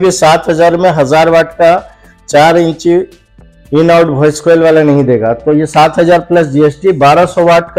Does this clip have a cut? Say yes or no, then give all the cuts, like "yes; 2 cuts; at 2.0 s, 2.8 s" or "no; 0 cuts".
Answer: no; 0 cuts